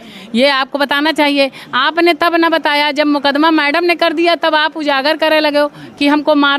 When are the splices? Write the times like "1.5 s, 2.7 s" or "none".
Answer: none